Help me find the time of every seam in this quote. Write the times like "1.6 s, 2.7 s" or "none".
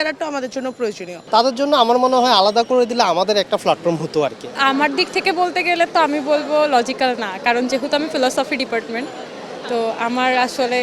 1.1 s, 4.5 s